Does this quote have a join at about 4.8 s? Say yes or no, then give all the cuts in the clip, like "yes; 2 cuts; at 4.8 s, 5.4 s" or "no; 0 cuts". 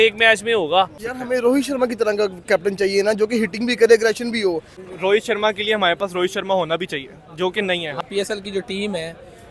yes; 3 cuts; at 1.1 s, 4.8 s, 8.0 s